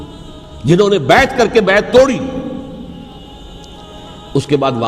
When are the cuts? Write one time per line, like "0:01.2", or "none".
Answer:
0:03.2